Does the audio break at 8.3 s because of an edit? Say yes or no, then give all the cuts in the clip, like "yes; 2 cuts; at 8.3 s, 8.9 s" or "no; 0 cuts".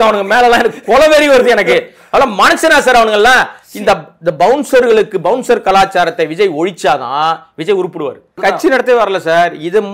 yes; 1 cut; at 8.3 s